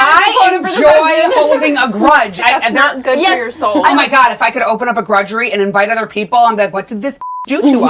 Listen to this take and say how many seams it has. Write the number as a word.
two